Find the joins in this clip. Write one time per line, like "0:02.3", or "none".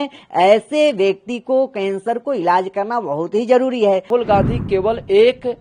0:04.1